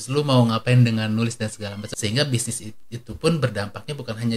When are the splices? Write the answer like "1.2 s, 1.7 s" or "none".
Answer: 1.8 s